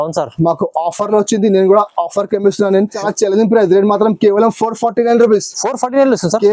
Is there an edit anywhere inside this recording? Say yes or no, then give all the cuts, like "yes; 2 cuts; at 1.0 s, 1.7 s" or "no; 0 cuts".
yes; 1 cut; at 3.0 s